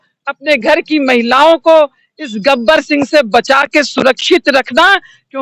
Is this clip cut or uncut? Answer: uncut